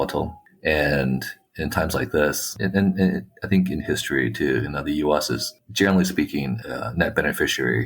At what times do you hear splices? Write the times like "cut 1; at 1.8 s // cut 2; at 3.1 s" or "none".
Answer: cut 1; at 2.5 s // cut 2; at 6.6 s